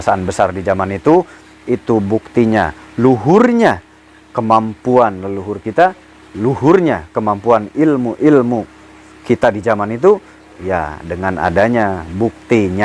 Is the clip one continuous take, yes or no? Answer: yes